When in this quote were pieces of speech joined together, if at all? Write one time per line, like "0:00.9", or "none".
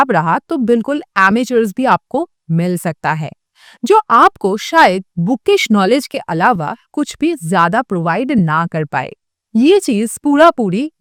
none

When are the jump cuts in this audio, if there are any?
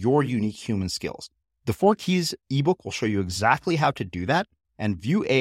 none

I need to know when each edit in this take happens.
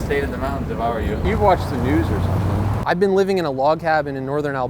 0:01.3

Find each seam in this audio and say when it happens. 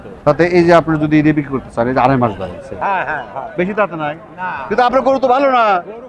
0:02.8

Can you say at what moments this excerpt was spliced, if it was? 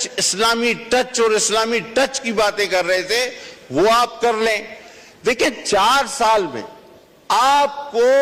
none

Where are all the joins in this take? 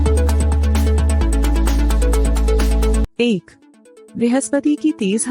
0:03.0

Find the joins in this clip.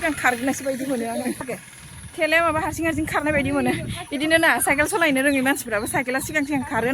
0:01.4

